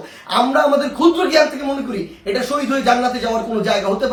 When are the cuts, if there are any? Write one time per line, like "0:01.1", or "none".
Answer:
none